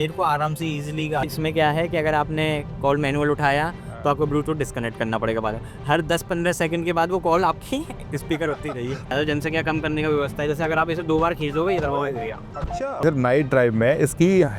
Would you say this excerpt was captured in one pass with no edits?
no; 3 cuts; at 1.3 s, 9.1 s, 13.0 s

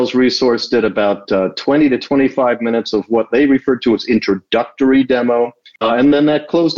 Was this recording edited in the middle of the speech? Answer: yes; 1 cut; at 5.7 s

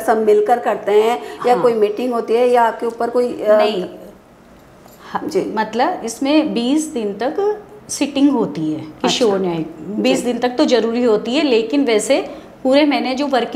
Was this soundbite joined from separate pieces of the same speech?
no; 0 cuts

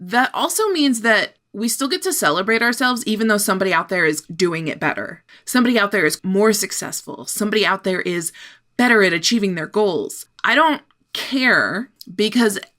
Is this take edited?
yes; 2 cuts; at 4.3 s, 6.2 s

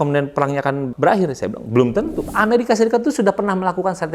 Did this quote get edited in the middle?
yes; 2 cuts; at 0.9 s, 2.2 s

